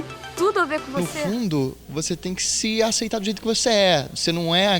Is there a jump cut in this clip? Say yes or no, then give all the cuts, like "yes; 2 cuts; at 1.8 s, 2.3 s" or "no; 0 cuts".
yes; 1 cut; at 1.1 s